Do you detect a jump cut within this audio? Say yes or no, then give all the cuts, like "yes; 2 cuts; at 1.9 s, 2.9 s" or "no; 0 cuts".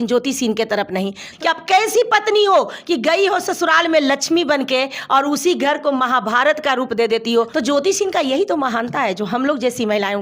yes; 2 cuts; at 1.3 s, 7.5 s